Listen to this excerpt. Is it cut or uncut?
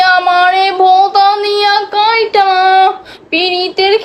uncut